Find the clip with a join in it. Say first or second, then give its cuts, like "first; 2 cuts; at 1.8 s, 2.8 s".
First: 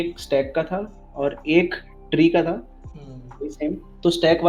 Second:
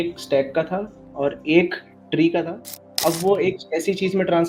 second; 1 cut; at 2.9 s